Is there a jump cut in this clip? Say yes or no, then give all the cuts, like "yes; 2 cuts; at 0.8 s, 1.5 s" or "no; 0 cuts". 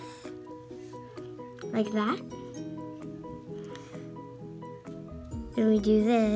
yes; 2 cuts; at 2.2 s, 5.0 s